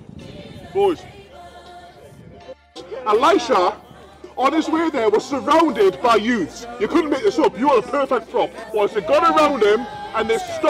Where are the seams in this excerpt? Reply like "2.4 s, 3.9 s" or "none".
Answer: 2.9 s, 8.6 s